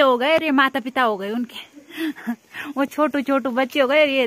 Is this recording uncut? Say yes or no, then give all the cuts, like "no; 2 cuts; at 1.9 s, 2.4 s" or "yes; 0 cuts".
yes; 0 cuts